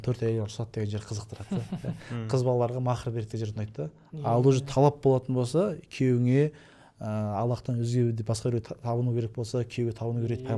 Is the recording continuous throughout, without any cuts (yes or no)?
yes